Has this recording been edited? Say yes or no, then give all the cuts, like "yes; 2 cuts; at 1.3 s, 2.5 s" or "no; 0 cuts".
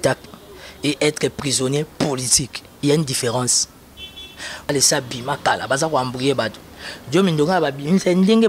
yes; 1 cut; at 4.7 s